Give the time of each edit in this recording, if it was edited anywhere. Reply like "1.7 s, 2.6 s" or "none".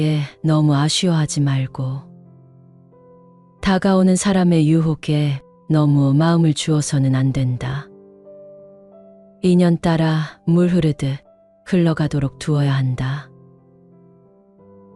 2.0 s, 3.6 s, 7.8 s, 9.3 s